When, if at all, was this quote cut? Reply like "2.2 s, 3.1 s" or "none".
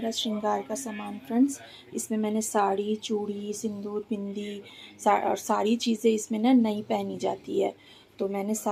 none